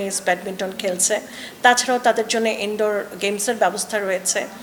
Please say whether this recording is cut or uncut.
uncut